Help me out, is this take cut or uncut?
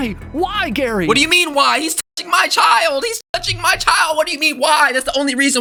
uncut